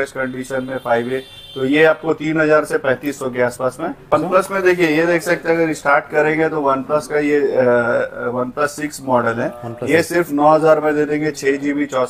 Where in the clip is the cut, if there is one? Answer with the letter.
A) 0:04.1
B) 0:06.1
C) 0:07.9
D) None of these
A